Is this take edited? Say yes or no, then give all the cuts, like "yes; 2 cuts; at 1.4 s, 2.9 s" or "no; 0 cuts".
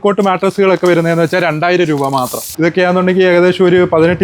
yes; 1 cut; at 2.4 s